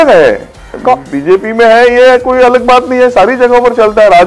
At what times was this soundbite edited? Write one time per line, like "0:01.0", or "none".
none